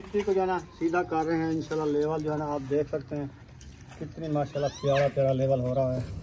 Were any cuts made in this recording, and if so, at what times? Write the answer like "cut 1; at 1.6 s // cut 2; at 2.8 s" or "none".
none